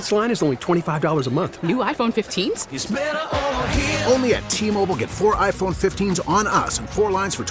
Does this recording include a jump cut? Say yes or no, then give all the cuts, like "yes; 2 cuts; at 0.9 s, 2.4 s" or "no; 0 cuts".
no; 0 cuts